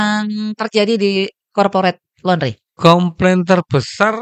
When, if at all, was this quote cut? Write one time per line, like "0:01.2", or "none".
0:02.6